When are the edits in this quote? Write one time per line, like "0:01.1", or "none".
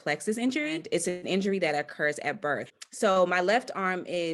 0:00.8
0:02.8